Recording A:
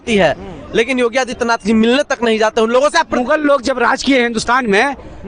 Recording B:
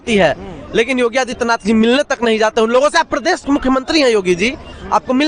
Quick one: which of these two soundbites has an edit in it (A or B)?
A